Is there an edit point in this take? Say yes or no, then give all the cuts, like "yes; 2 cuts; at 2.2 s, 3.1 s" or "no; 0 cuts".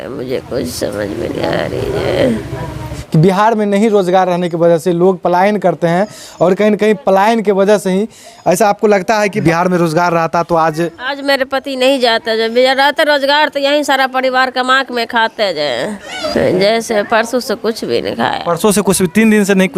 yes; 3 cuts; at 3.0 s, 9.4 s, 16.2 s